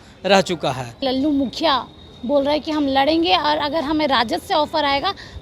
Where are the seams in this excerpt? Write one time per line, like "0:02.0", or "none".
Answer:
0:01.0